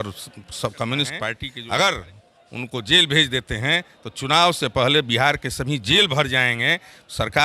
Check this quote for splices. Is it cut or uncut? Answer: cut